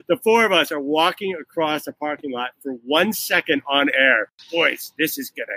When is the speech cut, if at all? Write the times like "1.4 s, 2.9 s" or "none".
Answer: 4.4 s